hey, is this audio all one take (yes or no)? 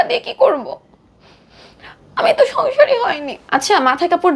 no